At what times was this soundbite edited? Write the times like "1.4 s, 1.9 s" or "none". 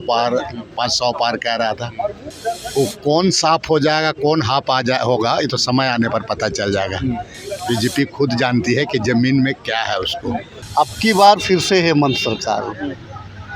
10.6 s